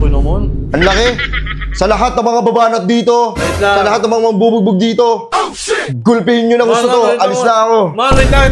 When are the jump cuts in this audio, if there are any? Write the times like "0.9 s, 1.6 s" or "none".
none